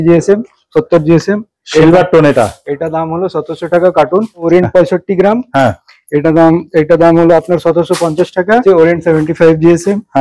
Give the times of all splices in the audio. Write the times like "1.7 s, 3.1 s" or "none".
4.5 s, 8.6 s